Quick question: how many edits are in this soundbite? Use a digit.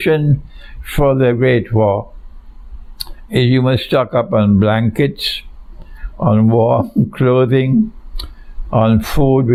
0